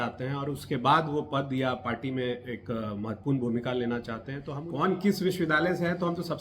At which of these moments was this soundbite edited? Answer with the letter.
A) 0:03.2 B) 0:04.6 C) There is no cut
B